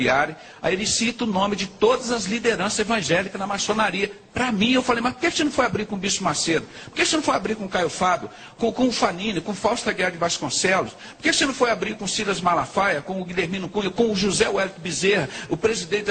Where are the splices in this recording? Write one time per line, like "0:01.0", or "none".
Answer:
none